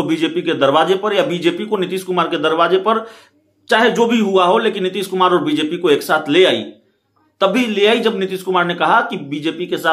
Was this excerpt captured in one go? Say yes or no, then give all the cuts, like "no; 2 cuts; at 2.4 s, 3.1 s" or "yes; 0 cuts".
yes; 0 cuts